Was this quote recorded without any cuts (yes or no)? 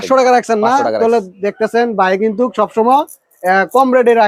yes